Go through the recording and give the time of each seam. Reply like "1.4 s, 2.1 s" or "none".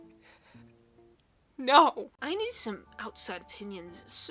2.1 s